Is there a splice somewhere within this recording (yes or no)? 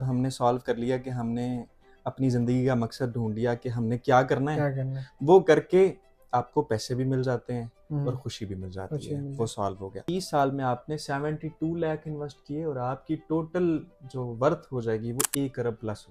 yes